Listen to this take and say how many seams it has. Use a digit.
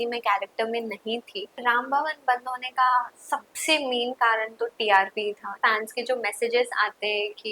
2